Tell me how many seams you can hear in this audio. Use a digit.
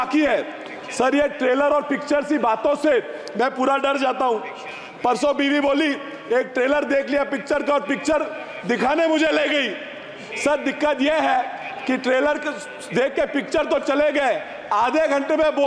0